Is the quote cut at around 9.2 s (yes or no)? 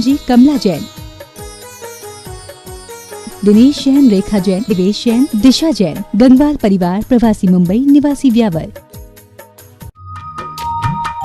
no